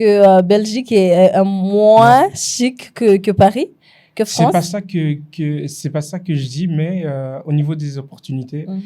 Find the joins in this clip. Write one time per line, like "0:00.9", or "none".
none